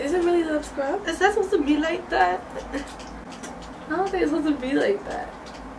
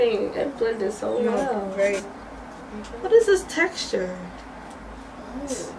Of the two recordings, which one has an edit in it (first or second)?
second